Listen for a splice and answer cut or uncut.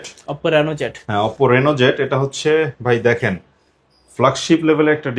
uncut